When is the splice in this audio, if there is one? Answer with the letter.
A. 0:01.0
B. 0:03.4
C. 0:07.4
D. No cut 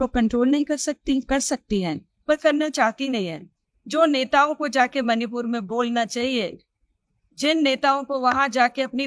D